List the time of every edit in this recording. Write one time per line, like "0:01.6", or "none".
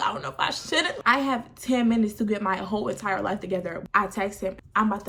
none